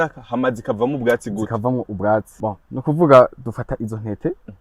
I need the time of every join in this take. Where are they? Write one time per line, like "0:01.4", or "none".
0:02.3